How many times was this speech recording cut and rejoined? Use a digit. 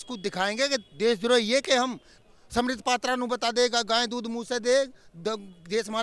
1